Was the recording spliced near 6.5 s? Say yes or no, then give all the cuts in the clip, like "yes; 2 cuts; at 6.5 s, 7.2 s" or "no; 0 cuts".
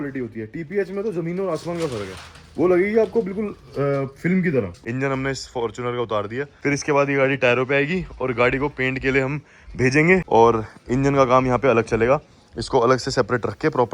yes; 3 cuts; at 4.8 s, 6.5 s, 10.2 s